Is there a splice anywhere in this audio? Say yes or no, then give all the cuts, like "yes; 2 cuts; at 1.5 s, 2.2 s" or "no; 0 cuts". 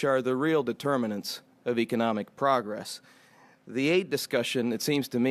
yes; 1 cut; at 3.3 s